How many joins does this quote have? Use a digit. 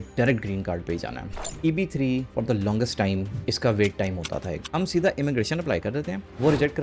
2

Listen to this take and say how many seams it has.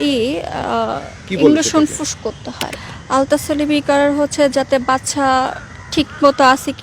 1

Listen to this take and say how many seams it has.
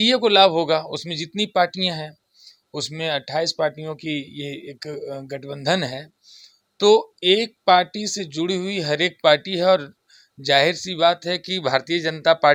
0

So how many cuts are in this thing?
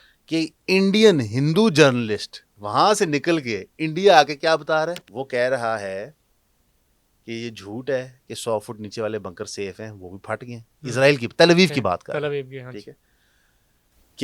1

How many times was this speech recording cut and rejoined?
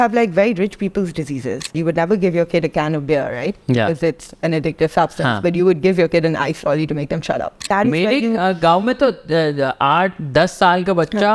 2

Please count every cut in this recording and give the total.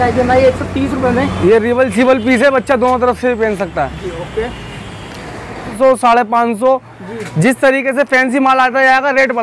1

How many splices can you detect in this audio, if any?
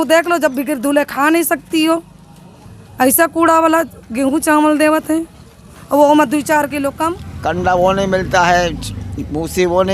1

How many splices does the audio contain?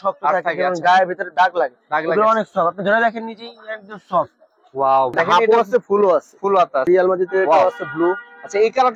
2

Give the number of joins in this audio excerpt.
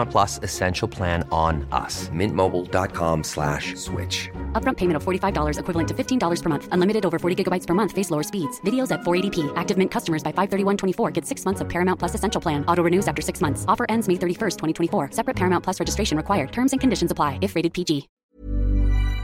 1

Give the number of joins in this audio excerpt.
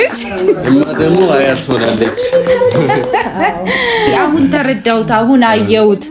1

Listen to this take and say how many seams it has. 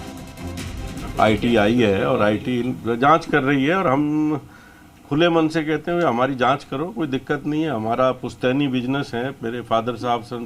1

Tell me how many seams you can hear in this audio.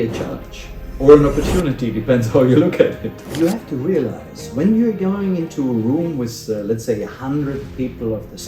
1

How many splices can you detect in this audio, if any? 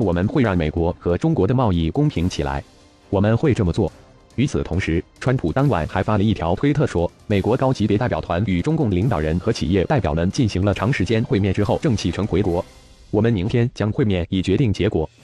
1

